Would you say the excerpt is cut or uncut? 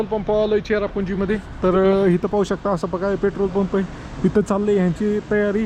uncut